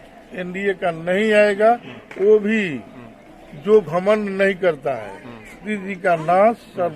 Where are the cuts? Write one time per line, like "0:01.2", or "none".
0:05.6